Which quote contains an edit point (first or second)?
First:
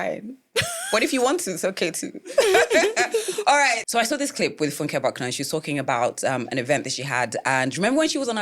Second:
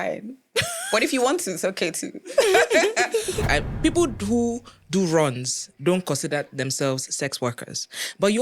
second